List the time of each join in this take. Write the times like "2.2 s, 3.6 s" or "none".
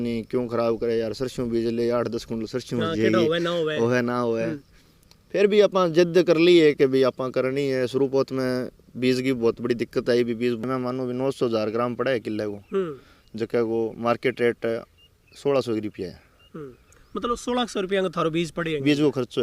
10.6 s